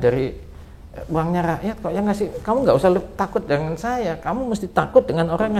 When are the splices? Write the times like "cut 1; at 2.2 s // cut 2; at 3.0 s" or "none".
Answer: none